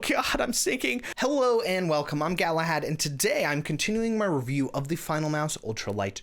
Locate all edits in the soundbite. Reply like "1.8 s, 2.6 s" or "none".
1.1 s

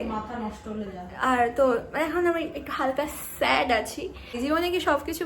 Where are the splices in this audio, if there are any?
4.4 s

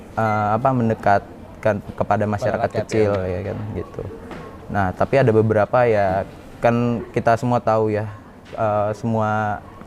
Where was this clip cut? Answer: none

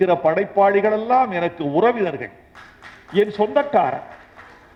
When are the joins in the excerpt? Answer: none

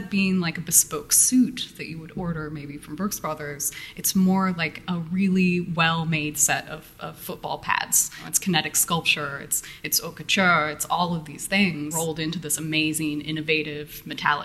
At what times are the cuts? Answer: 8.3 s, 11.9 s

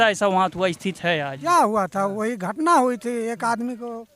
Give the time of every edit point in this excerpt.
1.3 s

